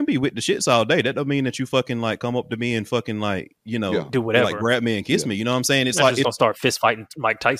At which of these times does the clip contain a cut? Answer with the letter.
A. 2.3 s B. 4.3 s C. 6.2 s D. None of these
C